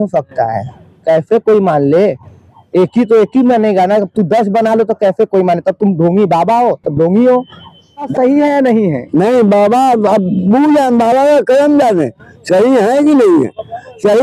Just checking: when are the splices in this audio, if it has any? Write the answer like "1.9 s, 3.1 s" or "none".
8.1 s